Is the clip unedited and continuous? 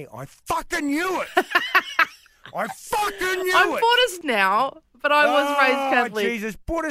no; 1 cut; at 4.2 s

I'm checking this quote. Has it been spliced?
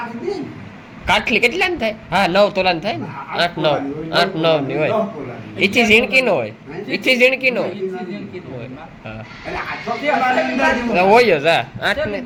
no; 0 cuts

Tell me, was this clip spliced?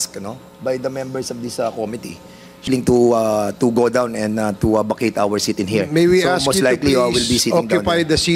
yes; 1 cut; at 2.7 s

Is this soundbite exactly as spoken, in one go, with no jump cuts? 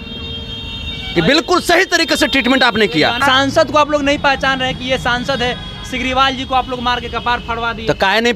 no; 1 cut; at 3.2 s

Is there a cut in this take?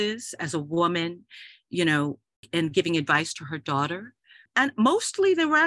no; 0 cuts

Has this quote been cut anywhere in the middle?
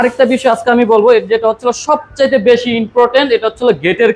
no; 0 cuts

